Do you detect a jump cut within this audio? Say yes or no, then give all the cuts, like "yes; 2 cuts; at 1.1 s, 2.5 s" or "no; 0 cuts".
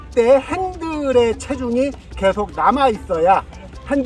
no; 0 cuts